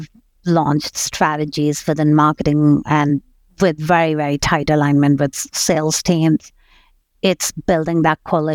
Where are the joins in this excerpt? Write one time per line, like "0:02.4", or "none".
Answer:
0:05.4